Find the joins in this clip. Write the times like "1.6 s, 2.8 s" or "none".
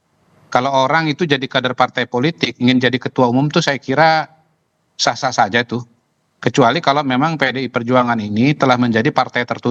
none